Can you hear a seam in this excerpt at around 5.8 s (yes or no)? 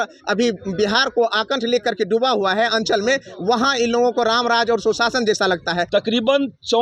yes